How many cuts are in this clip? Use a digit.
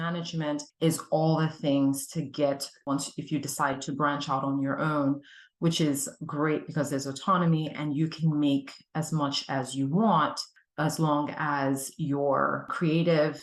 1